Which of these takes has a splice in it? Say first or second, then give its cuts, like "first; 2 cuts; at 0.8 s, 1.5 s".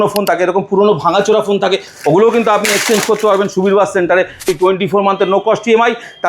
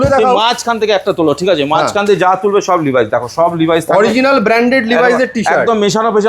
first; 1 cut; at 4.4 s